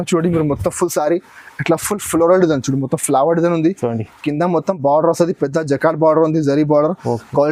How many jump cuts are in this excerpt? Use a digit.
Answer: 0